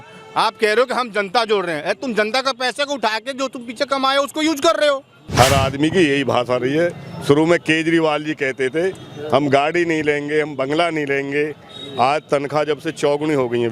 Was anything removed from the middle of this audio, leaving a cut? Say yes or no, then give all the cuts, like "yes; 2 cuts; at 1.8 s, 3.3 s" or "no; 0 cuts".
yes; 1 cut; at 5.3 s